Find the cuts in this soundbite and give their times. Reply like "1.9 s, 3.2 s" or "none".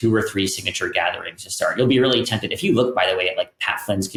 none